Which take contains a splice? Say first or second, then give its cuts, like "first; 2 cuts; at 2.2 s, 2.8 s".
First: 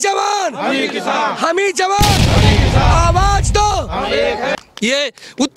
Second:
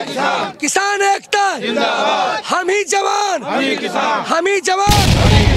first; 1 cut; at 4.5 s